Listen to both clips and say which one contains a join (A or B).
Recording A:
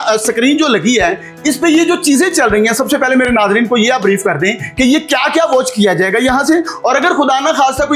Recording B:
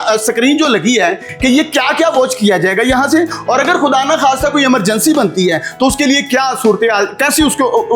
B